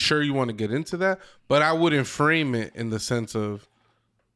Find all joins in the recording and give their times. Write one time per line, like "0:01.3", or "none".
none